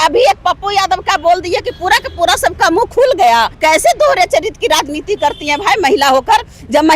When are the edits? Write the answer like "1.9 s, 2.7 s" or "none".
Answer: 3.5 s